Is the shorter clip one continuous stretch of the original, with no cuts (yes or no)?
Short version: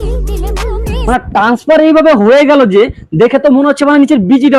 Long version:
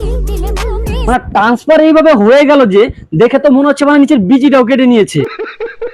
yes